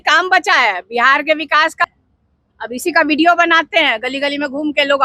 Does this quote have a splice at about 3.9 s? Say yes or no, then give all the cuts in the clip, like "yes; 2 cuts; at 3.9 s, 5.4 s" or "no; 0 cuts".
no; 1 cut; at 1.9 s